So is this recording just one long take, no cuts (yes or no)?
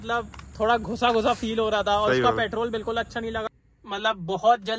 no